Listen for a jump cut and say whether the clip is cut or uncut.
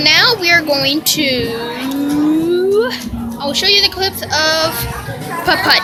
uncut